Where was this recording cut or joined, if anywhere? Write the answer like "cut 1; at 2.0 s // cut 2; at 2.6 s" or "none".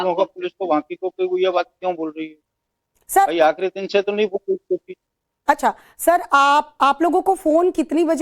cut 1; at 3.2 s